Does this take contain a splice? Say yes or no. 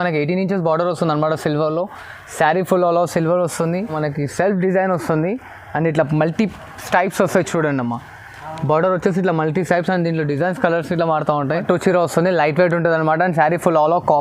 yes